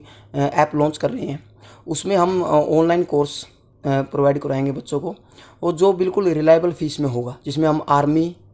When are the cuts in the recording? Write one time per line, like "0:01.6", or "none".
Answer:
none